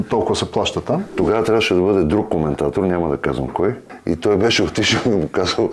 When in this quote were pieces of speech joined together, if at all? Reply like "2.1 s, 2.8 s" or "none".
1.1 s, 3.9 s